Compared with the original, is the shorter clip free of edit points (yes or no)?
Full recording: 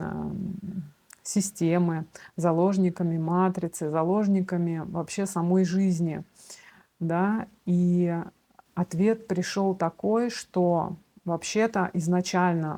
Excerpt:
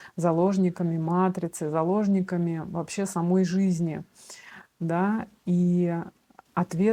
yes